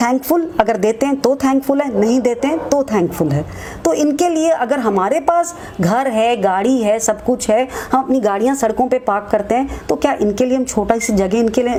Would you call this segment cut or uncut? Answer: uncut